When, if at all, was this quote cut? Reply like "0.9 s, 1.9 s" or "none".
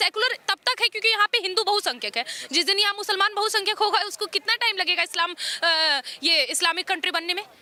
none